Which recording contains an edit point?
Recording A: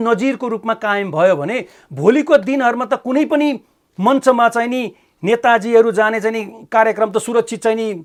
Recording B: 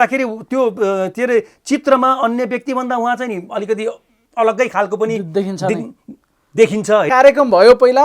B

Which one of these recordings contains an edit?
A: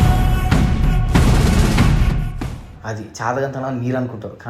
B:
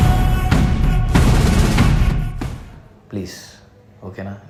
A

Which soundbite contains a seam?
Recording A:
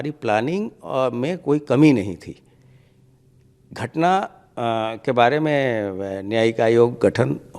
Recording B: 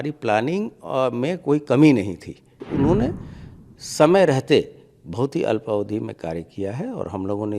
B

